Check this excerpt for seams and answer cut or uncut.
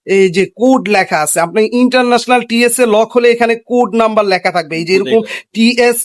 uncut